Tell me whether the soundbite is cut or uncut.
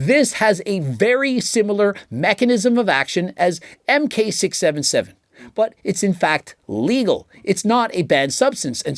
uncut